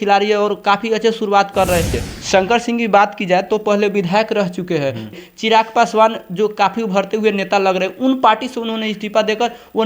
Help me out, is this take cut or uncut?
cut